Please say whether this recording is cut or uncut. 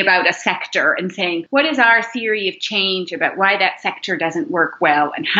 cut